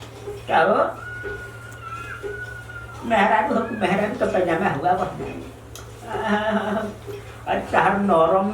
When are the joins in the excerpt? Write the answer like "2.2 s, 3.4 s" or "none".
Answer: none